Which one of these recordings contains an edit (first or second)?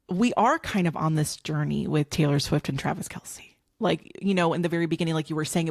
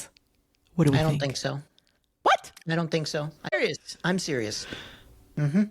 second